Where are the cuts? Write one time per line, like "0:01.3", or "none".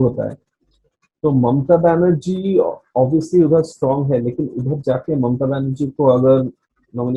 none